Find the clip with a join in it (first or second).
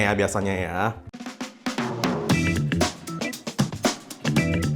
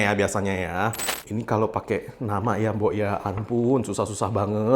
second